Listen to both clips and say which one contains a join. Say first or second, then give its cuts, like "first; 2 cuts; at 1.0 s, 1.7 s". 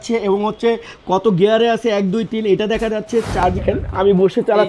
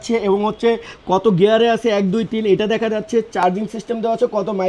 first; 1 cut; at 3.6 s